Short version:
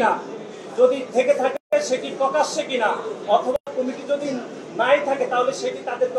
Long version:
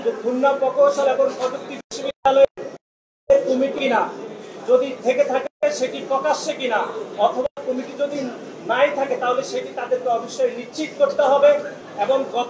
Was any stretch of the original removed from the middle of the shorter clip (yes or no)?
no